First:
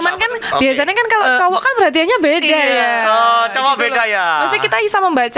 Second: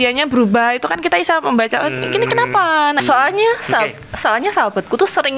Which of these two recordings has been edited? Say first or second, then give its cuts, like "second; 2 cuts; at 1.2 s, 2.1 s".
second; 1 cut; at 3.0 s